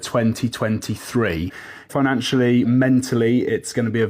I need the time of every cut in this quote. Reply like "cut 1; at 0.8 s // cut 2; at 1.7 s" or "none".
cut 1; at 1.9 s